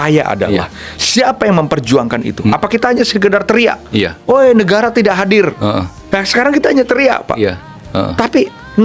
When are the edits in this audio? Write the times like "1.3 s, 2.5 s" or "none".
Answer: none